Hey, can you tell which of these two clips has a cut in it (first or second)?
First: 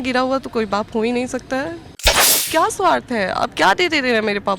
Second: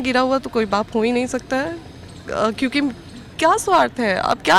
first